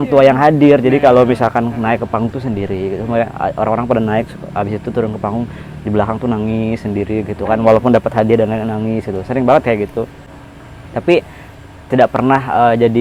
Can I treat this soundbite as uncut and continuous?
yes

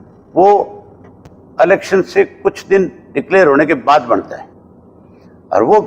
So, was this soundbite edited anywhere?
no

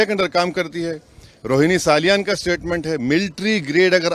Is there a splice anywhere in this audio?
no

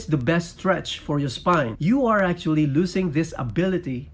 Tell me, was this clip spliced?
no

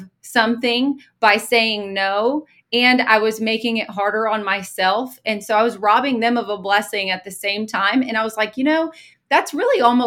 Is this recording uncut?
yes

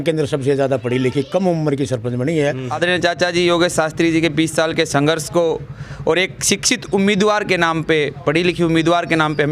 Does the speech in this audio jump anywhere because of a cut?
yes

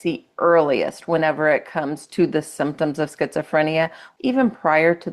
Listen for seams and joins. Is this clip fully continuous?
no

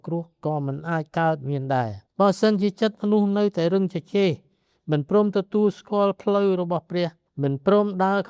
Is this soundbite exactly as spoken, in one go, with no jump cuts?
yes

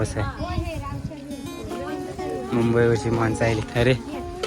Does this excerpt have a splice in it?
no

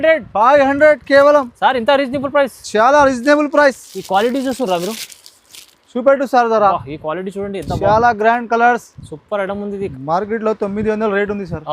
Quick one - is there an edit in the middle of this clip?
yes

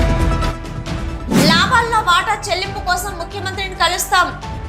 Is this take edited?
yes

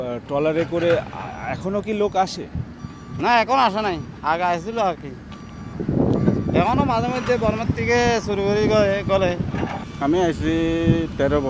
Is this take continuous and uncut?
no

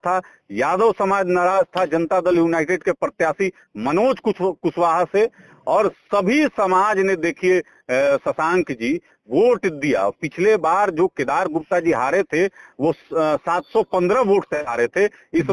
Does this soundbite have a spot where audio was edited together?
no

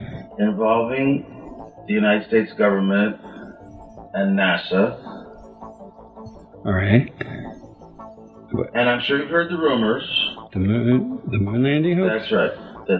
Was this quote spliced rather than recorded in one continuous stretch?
yes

